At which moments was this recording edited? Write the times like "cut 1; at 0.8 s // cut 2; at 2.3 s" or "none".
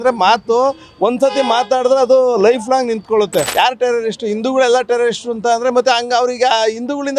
cut 1; at 3.5 s